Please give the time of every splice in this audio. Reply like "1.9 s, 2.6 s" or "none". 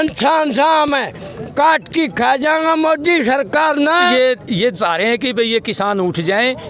4.1 s